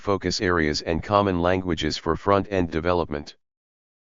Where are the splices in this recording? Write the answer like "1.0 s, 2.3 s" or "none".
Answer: 1.8 s